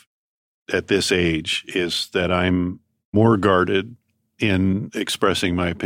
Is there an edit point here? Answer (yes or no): yes